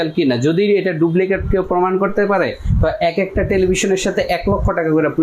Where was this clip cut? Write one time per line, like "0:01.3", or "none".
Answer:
none